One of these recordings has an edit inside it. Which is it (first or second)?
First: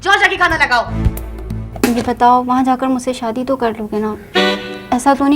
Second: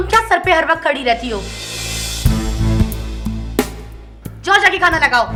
first